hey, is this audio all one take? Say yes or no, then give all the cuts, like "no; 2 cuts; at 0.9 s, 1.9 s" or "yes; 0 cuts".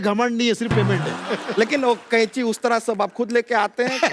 no; 1 cut; at 1.2 s